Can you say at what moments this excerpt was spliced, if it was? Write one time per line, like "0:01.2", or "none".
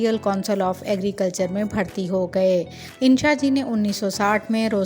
0:02.8